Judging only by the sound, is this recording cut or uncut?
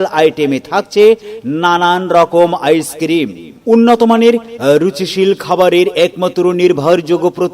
cut